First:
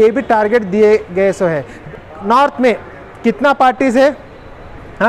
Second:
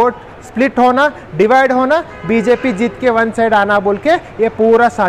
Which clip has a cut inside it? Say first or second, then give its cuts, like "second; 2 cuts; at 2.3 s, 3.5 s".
first; 1 cut; at 1.8 s